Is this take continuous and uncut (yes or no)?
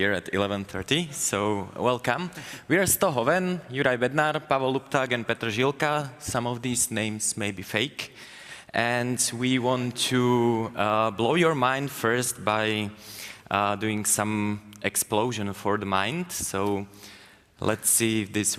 yes